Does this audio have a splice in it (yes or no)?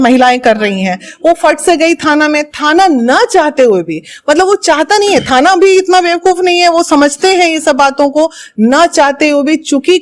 no